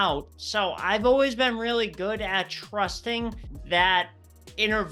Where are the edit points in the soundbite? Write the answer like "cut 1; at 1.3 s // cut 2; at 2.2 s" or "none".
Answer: cut 1; at 3.5 s